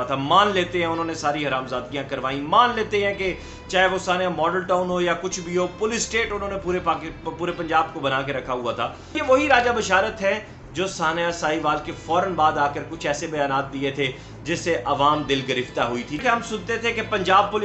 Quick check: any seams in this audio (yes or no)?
yes